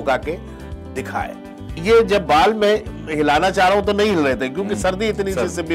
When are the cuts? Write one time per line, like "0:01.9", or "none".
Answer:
0:01.8